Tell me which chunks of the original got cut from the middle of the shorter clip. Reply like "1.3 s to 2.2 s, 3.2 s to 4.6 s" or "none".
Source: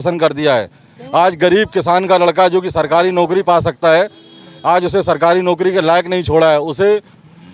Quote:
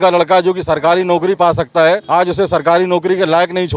4.1 s to 4.6 s

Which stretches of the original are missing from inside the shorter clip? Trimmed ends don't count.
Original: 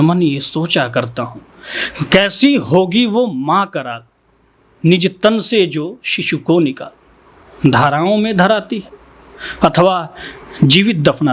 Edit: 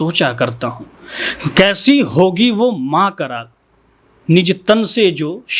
none

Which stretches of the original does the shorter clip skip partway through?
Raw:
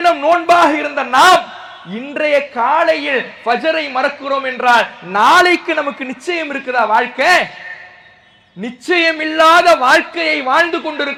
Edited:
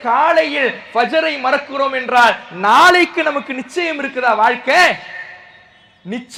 none

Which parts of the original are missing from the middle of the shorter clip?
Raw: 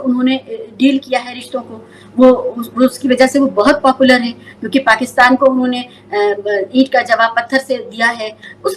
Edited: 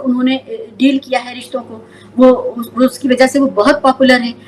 none

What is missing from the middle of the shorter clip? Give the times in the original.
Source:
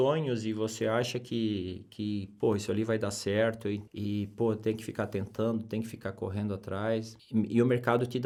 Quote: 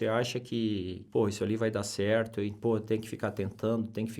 1.8 s to 2.3 s, 3.8 s to 4.3 s

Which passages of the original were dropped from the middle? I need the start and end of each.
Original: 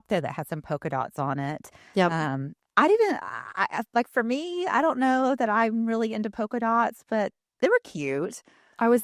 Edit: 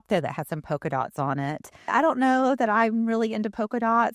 1.9 s to 4.7 s

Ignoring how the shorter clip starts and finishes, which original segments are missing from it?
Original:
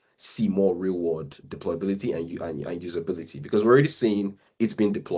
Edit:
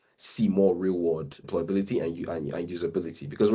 1.3 s to 1.5 s

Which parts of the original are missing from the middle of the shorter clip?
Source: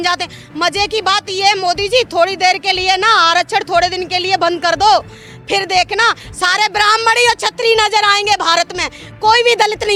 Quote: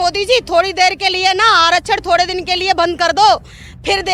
none

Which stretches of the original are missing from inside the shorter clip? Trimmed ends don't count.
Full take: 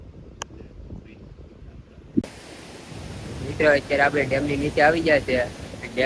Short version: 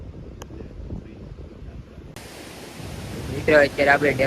2.1 s to 2.2 s

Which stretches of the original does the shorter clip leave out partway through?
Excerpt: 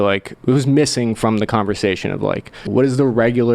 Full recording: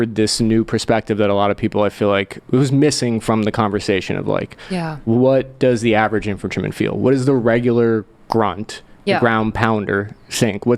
4.7 s to 6.9 s

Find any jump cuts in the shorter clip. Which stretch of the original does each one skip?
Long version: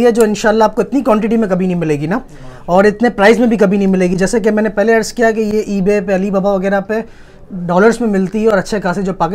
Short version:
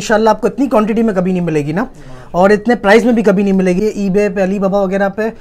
4.1 s to 5.5 s

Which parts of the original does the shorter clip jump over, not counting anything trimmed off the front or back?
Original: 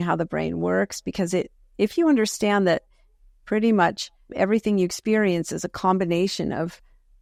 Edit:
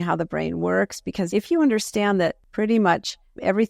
1.3 s to 1.7 s, 2.9 s to 3.4 s

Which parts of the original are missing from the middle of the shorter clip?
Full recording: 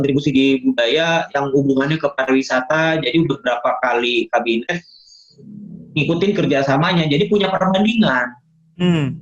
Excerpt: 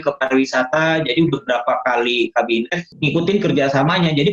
4.8 s to 5.8 s

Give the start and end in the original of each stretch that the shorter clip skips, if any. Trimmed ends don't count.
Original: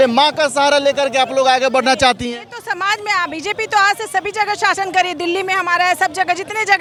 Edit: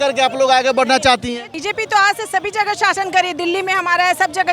2.5 s to 3.4 s

